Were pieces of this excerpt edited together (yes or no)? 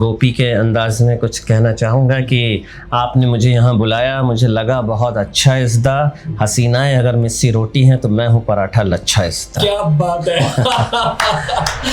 no